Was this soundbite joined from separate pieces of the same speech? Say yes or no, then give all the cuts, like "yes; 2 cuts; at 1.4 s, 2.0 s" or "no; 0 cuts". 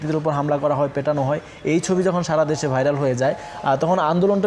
no; 0 cuts